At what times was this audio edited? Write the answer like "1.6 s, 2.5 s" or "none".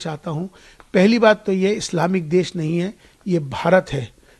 none